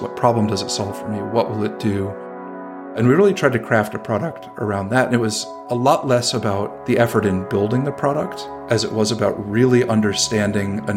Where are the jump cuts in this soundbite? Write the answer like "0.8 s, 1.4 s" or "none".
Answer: none

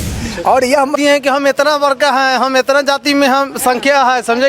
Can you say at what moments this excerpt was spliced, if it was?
1.0 s

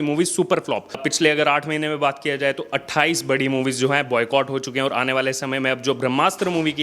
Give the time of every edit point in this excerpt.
1.0 s

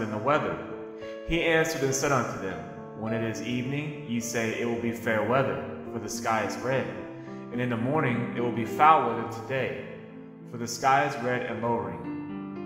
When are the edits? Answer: 2.5 s

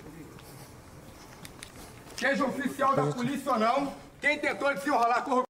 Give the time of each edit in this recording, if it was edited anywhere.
none

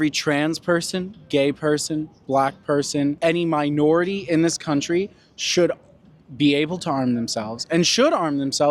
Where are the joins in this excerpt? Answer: none

